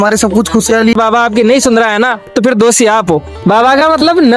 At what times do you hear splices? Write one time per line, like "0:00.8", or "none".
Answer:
0:00.9
0:03.3

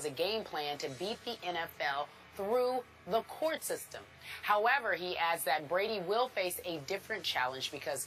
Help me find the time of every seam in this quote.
0:01.4

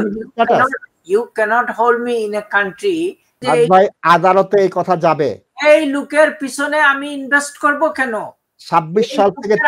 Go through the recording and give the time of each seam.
0:03.4

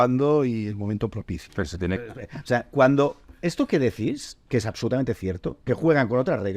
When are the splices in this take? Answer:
0:02.1

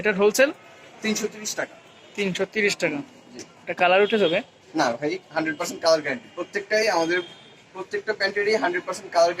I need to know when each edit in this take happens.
none

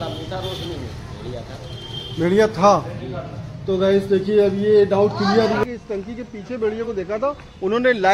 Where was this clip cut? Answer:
0:05.6

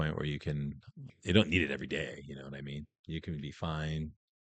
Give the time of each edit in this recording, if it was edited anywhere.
0:01.1

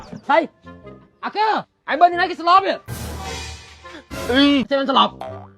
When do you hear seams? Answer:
0:01.7
0:04.7

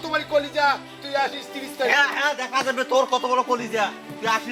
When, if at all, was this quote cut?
none

